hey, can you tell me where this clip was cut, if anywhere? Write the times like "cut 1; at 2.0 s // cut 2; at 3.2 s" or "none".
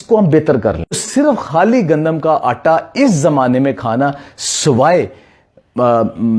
cut 1; at 1.0 s